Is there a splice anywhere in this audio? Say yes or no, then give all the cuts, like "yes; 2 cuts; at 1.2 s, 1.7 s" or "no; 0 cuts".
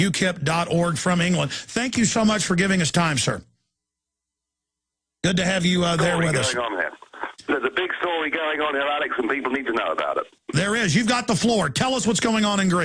yes; 1 cut; at 7.5 s